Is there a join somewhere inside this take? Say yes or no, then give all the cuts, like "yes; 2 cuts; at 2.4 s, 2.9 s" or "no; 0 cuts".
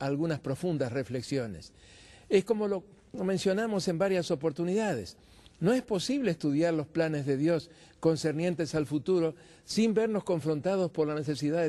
no; 0 cuts